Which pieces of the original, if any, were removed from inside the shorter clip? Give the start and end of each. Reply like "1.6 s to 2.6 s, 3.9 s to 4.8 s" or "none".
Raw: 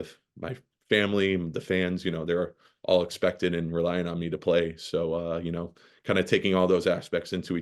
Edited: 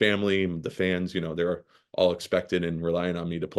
none